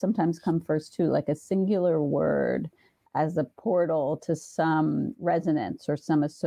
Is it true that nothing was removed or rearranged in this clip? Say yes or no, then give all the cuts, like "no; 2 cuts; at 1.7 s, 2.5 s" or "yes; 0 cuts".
yes; 0 cuts